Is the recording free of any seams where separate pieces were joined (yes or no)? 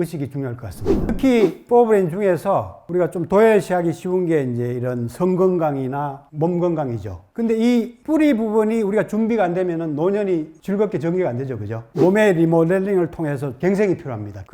no